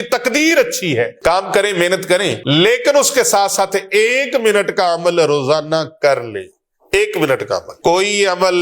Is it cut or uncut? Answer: cut